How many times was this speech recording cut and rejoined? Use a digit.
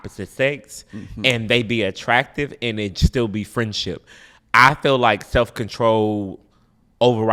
0